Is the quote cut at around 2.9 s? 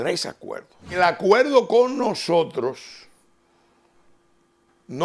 no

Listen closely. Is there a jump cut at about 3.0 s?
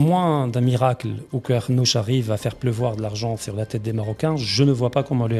no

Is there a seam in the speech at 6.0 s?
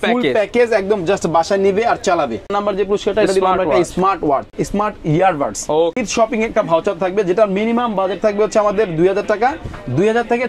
yes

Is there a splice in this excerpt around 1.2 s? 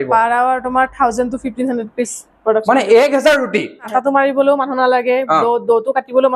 no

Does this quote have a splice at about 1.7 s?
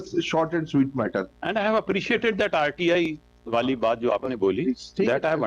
no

